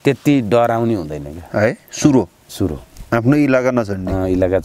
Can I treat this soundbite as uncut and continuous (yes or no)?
no